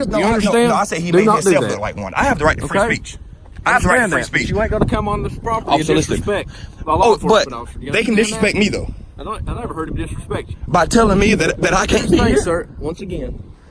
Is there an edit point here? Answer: no; 0 cuts

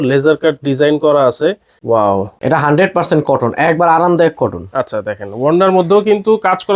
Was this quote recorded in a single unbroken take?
no; 2 cuts; at 1.7 s, 2.3 s

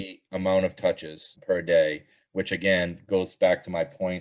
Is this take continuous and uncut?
no; 1 cut; at 1.4 s

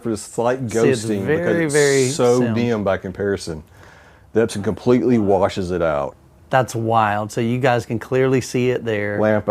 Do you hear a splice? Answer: yes; 1 cut; at 6.2 s

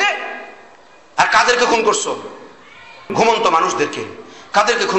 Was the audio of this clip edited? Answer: no; 0 cuts

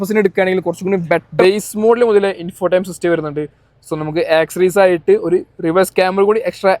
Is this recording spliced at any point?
yes; 1 cut; at 1.4 s

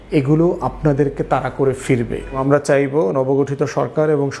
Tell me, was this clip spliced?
yes; 1 cut; at 2.4 s

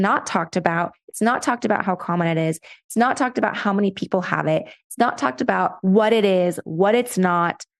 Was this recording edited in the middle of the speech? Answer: no; 0 cuts

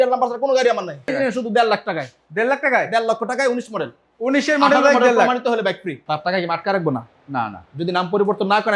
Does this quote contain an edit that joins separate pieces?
yes; 2 cuts; at 1.1 s, 5.9 s

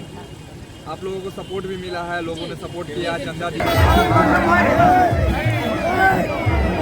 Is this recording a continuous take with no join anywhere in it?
no; 1 cut; at 3.6 s

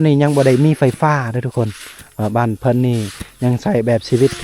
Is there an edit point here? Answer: no; 0 cuts

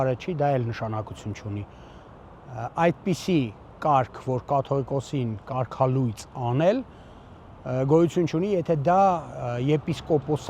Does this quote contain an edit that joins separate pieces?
no; 0 cuts

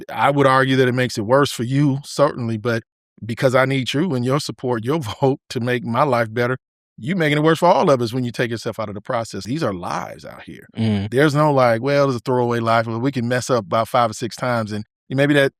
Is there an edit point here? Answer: yes; 1 cut; at 9.4 s

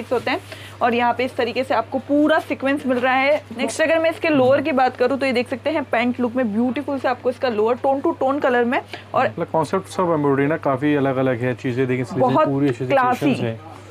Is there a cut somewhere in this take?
yes; 2 cuts; at 3.5 s, 9.4 s

